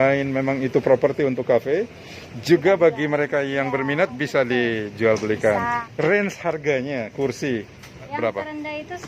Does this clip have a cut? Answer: yes; 2 cuts; at 5.8 s, 8.1 s

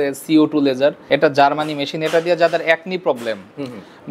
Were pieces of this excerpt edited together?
yes; 1 cut; at 1.0 s

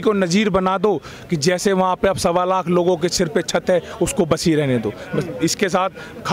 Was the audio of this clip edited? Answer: no; 0 cuts

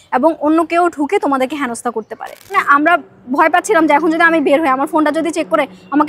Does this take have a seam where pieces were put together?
yes; 1 cut; at 2.6 s

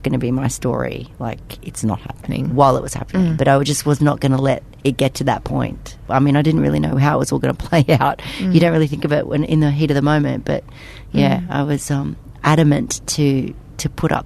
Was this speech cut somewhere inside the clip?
yes; 3 cuts; at 2.2 s, 3.4 s, 5.9 s

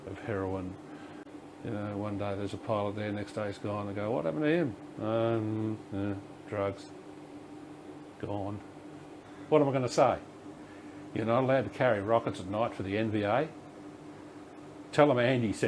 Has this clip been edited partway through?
yes; 2 cuts; at 1.2 s, 9.2 s

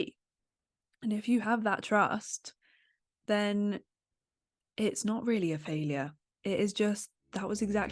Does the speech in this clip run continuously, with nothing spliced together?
yes; 0 cuts

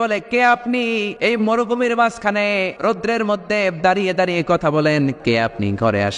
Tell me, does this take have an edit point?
yes; 3 cuts; at 1.1 s, 2.7 s, 5.2 s

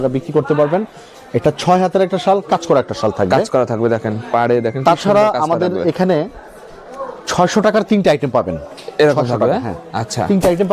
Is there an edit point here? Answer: no; 0 cuts

